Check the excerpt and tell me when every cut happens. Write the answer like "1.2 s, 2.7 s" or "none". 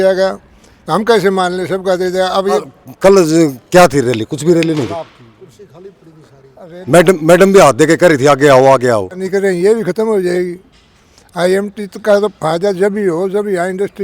2.6 s, 9.2 s